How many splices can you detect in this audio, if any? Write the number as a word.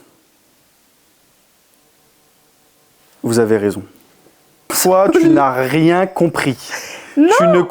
one